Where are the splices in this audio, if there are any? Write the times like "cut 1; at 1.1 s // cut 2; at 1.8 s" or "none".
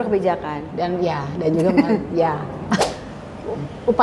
cut 1; at 2.8 s